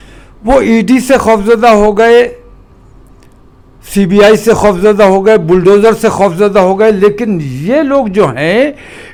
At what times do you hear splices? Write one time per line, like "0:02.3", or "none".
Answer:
none